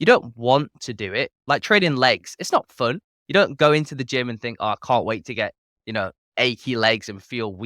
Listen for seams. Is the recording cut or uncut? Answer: cut